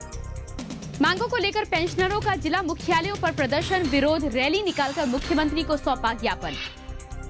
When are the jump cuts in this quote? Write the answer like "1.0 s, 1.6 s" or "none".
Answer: 1.0 s